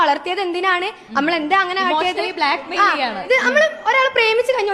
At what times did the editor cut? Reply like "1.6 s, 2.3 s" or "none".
none

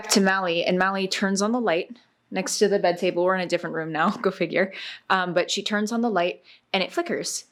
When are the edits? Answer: none

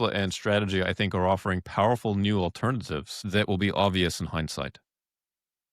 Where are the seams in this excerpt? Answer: 3.1 s

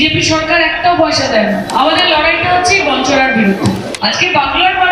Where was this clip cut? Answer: 1.7 s, 3.9 s

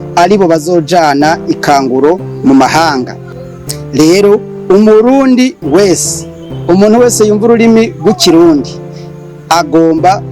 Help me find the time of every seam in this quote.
3.2 s

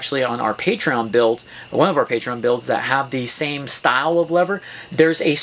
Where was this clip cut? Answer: none

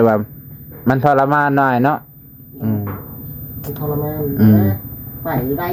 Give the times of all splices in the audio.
none

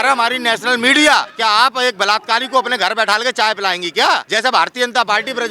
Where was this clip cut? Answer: 1.3 s, 4.3 s

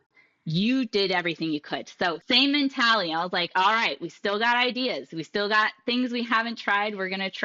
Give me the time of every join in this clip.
2.2 s

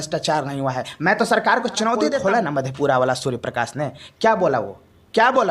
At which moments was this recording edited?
2.1 s

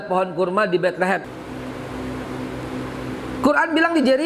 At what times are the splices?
1.2 s

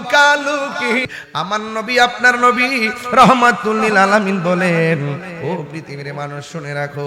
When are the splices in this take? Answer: 1.1 s

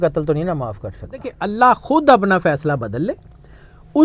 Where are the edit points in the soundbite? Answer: 1.3 s

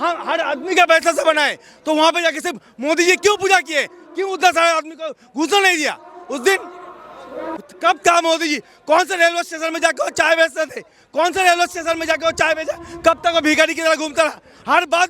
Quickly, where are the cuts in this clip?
7.5 s

